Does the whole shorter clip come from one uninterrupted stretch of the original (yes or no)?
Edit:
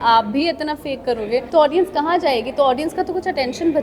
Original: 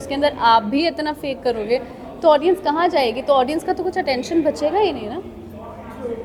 no